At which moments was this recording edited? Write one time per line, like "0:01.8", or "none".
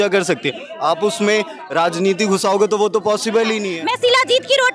0:03.7